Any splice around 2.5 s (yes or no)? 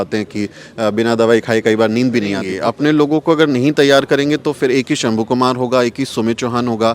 yes